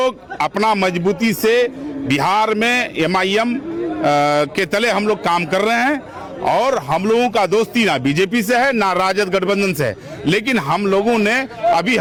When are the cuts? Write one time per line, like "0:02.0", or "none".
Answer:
none

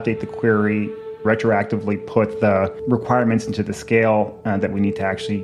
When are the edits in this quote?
none

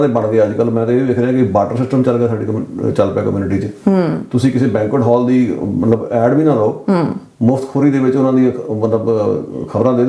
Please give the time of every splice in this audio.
none

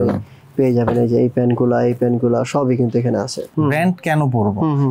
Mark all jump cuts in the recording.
0:03.5

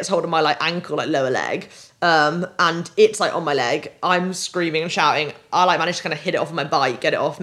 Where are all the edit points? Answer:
none

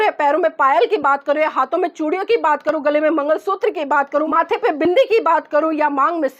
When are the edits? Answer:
0:04.3

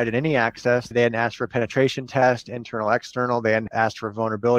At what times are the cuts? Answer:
0:00.9
0:03.7

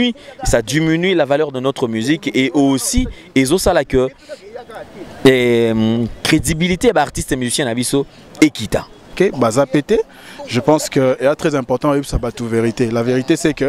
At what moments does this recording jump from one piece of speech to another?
0:09.0

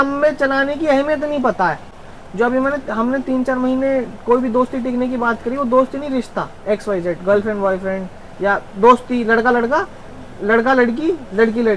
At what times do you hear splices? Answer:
none

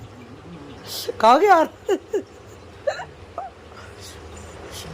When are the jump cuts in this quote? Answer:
0:02.9

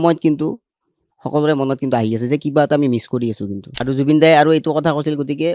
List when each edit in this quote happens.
0:03.8

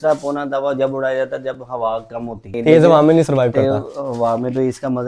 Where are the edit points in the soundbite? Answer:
0:02.5

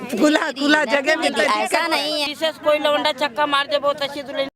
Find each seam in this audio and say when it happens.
0:02.2

